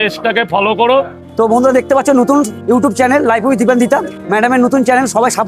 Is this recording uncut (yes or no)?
no